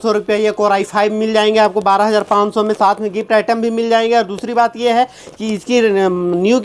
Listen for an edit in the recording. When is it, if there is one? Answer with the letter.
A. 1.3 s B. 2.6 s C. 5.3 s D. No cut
D